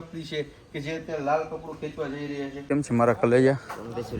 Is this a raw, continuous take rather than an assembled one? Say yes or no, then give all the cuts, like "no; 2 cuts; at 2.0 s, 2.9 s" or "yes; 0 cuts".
no; 1 cut; at 2.6 s